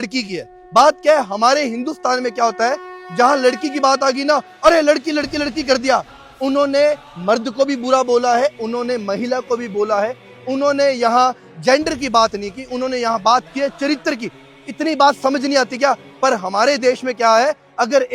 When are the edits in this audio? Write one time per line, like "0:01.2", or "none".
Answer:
none